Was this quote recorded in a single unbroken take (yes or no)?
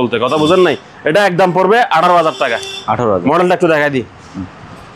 yes